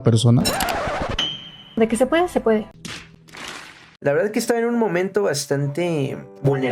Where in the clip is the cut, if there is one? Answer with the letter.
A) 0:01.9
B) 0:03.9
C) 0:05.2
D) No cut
B